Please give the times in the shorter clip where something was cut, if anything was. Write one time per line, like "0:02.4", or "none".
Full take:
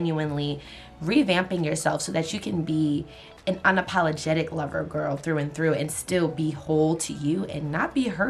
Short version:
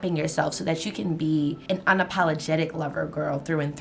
0:01.6